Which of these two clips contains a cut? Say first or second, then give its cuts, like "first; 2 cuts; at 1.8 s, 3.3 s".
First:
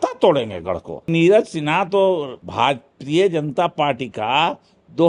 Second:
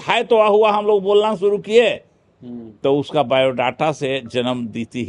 first; 2 cuts; at 1.1 s, 2.4 s